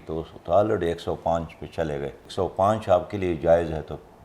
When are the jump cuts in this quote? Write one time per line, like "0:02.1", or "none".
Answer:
0:02.2